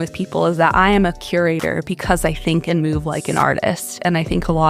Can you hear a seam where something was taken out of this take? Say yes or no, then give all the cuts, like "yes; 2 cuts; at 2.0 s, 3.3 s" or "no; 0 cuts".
no; 0 cuts